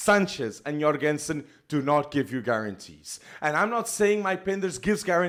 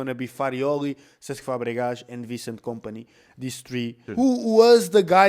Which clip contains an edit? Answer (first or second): second